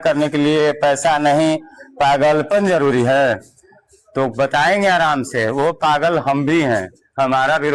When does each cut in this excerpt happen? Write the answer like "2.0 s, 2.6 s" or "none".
none